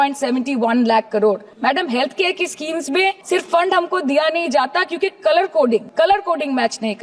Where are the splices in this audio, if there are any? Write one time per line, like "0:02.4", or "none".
0:01.5
0:03.2
0:05.9